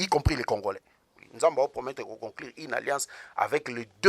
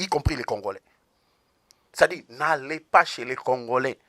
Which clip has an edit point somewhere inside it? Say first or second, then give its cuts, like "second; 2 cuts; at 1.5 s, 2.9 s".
first; 1 cut; at 1.2 s